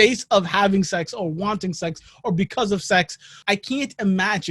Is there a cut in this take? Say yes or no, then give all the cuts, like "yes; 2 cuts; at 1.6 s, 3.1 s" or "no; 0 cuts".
yes; 1 cut; at 3.3 s